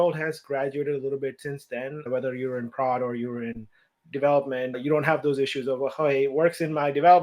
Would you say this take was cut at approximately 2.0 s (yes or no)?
yes